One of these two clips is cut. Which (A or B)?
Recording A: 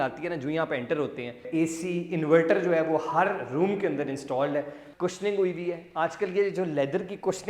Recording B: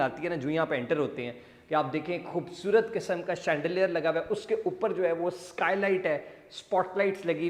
A